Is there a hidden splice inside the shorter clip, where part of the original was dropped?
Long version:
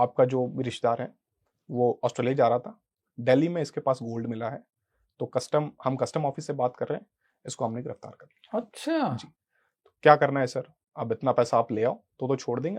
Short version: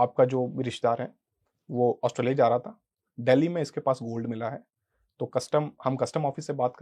no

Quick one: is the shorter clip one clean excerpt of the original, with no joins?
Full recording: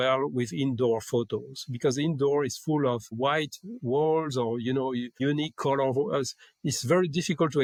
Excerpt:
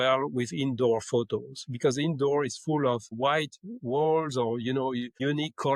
yes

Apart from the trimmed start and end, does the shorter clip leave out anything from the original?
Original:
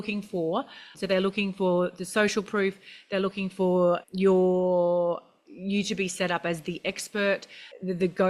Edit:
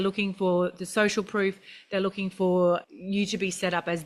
yes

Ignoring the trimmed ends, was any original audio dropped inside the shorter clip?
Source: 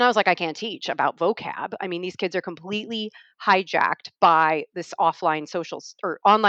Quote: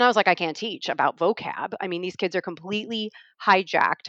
no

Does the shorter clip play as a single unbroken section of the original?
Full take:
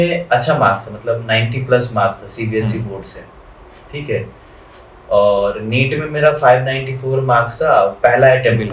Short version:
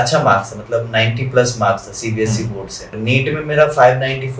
no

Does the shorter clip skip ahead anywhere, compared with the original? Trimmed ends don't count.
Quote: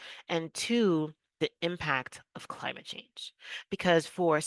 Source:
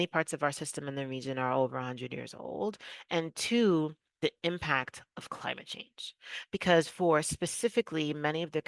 no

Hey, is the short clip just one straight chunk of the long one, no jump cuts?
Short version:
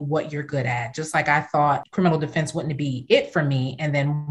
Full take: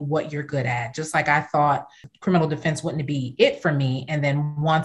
no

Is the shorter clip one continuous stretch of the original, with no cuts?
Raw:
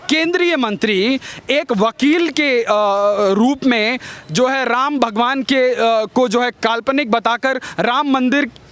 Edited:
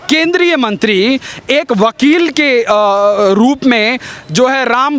yes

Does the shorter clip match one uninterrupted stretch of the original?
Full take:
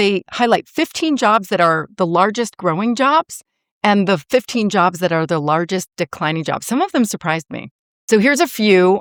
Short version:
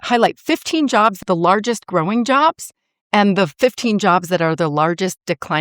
no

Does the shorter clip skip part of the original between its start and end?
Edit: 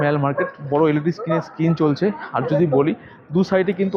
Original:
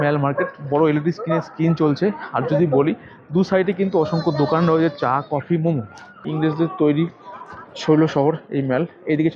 no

